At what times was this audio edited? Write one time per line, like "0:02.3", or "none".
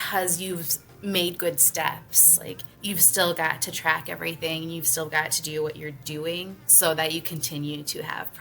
0:02.8
0:06.6